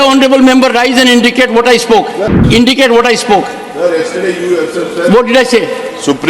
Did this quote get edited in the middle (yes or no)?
yes